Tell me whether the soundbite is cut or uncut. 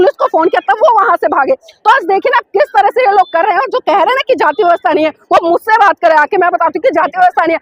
uncut